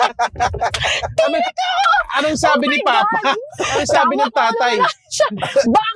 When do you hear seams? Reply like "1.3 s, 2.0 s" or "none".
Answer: none